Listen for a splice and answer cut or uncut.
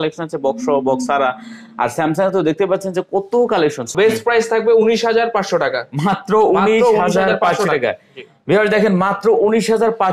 cut